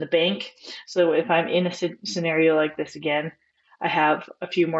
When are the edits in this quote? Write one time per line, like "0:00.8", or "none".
none